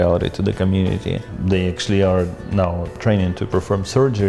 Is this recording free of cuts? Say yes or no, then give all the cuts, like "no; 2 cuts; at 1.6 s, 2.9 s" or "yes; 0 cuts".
no; 2 cuts; at 1.3 s, 3.0 s